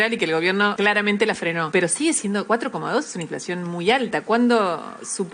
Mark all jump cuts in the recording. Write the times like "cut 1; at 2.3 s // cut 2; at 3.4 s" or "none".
cut 1; at 0.7 s // cut 2; at 1.7 s // cut 3; at 2.4 s